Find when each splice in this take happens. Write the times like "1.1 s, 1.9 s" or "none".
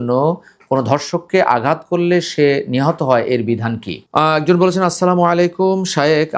3.9 s